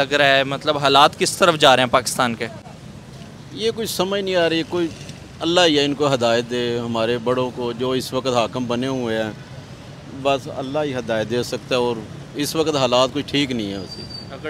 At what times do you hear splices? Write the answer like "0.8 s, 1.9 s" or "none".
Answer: none